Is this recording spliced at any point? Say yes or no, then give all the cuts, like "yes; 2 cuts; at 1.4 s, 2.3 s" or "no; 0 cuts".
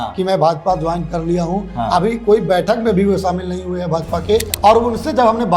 yes; 1 cut; at 4.5 s